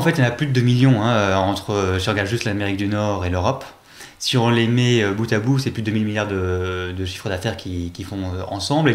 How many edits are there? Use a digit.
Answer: 0